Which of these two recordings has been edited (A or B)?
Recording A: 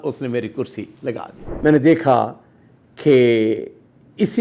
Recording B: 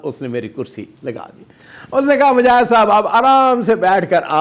A